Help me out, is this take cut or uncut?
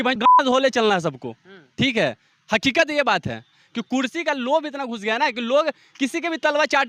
uncut